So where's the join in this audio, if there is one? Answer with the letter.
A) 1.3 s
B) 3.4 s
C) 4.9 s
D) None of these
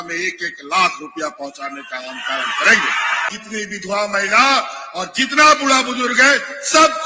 B